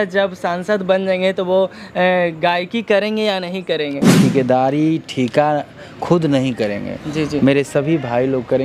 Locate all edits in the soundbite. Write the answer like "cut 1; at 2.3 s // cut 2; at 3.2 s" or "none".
cut 1; at 4.0 s